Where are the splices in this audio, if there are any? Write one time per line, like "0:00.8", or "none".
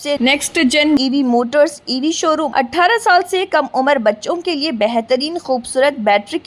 0:02.5

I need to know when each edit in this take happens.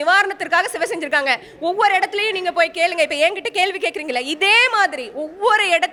none

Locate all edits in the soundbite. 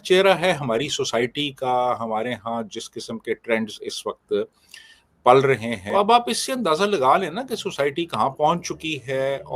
0:05.8

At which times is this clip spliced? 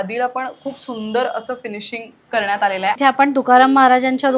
0:03.0

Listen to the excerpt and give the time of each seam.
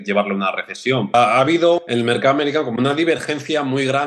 0:01.1
0:01.9

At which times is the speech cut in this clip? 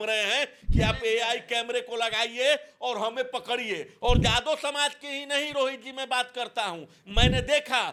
none

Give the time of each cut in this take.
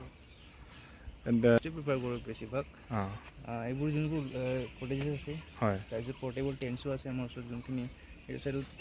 0:01.6

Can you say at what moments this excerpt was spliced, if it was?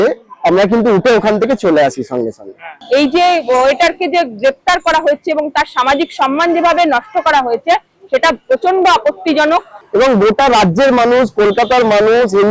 0:02.7
0:09.8

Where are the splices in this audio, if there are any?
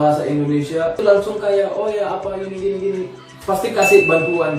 0:01.0

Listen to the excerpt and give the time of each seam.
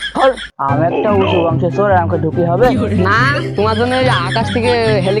none

